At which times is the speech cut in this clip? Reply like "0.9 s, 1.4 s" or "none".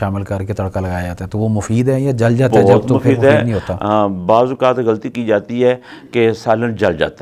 none